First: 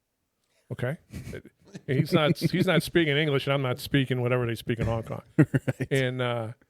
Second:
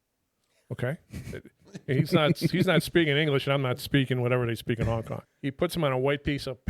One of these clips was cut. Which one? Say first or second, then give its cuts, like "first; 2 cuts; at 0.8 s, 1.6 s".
second; 1 cut; at 5.2 s